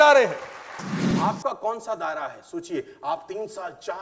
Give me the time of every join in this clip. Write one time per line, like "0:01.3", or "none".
0:01.1